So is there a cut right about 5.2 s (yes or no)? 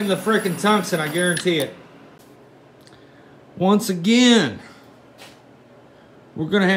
no